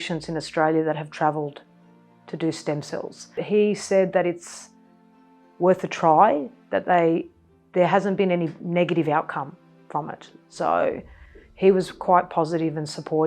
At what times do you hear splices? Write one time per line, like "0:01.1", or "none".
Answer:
0:03.4